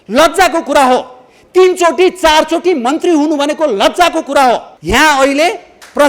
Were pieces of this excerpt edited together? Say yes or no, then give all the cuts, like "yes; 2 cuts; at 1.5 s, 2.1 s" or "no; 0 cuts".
yes; 1 cut; at 4.7 s